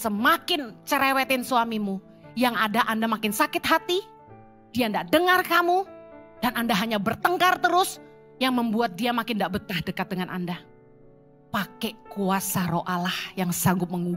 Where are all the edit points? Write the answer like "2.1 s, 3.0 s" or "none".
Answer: none